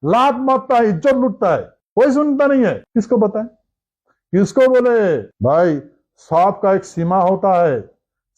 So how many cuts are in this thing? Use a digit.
3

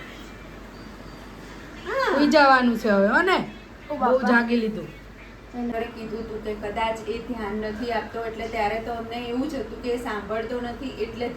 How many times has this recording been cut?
1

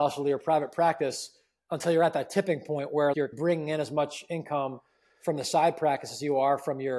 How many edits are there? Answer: 1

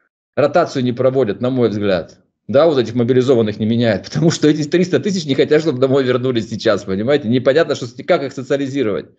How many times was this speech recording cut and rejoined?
0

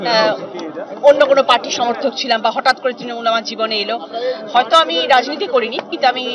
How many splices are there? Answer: 1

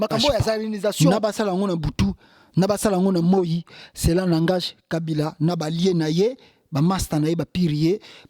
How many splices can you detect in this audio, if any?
1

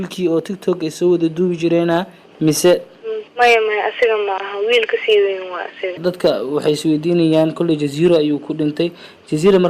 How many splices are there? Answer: 1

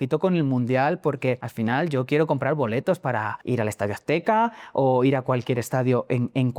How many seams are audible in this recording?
2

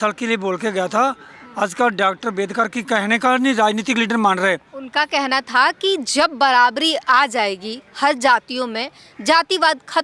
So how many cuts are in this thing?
0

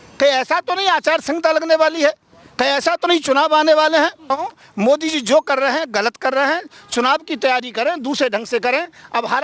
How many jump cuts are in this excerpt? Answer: 1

